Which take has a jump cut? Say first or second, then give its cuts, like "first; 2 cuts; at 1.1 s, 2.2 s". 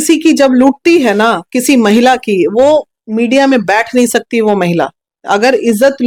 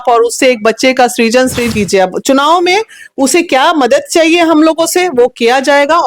second; 1 cut; at 1.7 s